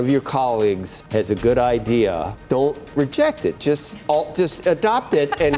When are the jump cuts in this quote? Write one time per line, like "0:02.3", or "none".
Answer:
0:00.9
0:02.3

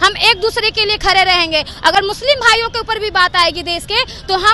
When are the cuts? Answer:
none

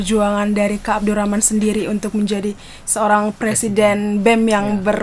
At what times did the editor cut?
none

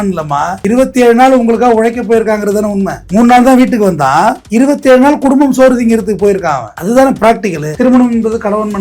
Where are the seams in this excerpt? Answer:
0:07.6

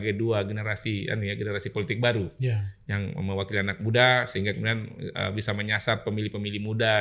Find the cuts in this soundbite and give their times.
none

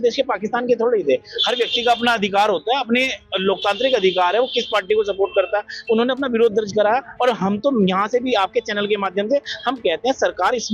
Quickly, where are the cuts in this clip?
none

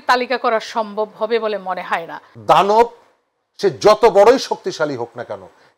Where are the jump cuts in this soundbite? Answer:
0:02.2

